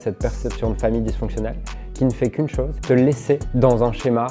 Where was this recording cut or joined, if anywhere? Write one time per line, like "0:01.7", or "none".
0:02.8
0:03.5

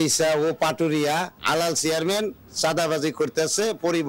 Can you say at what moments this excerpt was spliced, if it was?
0:01.4
0:02.4

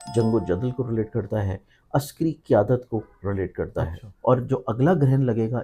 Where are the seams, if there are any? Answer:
0:04.0

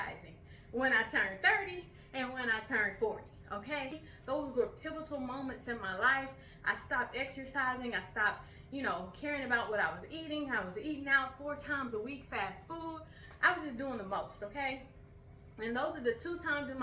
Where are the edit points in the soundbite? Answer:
0:04.1

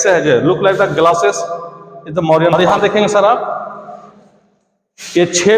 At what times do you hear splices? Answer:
0:02.5

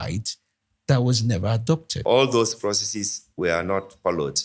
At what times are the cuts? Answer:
0:01.9

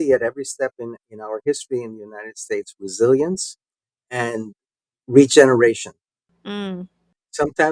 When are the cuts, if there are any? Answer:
none

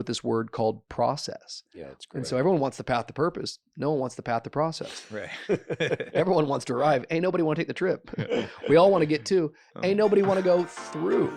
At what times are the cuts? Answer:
none

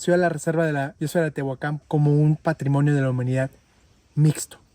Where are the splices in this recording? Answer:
0:01.0
0:01.8

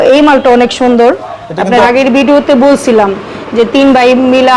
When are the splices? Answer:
0:01.7

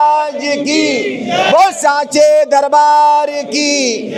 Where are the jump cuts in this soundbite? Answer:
none

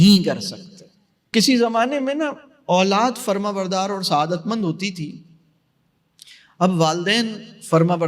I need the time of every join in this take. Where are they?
0:01.3

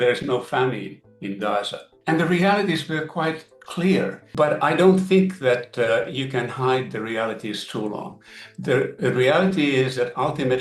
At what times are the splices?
0:01.8

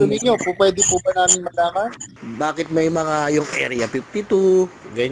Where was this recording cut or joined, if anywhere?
0:02.1

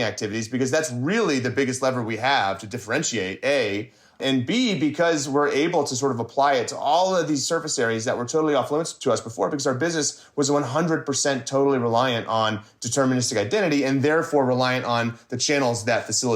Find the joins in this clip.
0:04.2
0:08.9

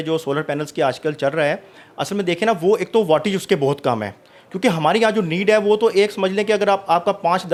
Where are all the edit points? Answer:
none

